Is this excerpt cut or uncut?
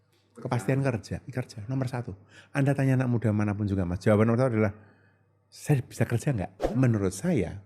cut